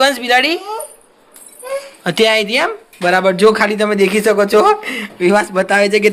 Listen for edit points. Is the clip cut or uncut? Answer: uncut